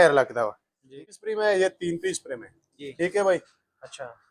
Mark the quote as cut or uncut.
cut